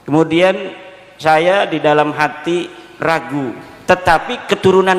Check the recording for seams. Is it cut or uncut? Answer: cut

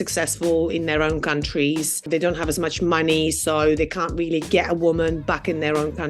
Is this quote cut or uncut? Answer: cut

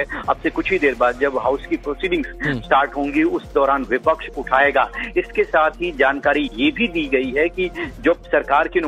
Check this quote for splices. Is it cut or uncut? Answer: cut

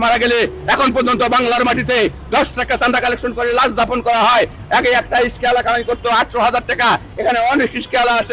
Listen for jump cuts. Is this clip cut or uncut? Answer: uncut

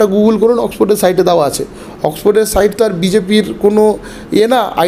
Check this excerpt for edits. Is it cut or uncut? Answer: uncut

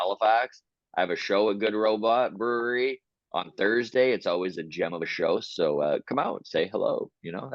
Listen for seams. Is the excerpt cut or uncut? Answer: uncut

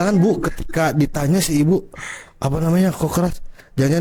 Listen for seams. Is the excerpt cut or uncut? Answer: uncut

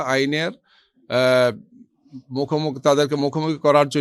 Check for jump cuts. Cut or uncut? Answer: uncut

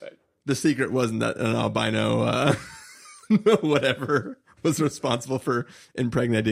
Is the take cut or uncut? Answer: cut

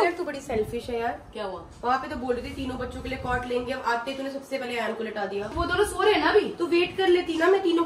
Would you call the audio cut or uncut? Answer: uncut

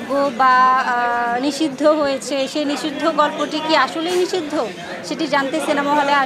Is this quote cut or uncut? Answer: uncut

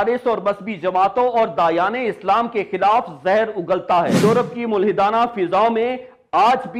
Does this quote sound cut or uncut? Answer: cut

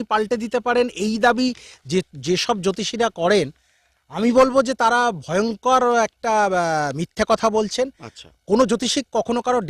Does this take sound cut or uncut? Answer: uncut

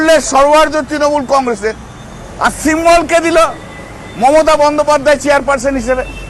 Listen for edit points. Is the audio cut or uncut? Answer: uncut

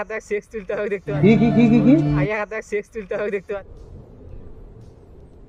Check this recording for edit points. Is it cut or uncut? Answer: uncut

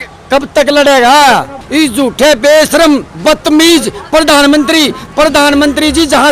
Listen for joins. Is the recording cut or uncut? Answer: cut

